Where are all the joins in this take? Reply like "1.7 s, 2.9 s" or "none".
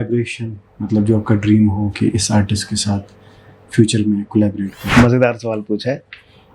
4.8 s

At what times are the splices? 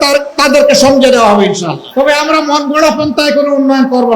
1.8 s

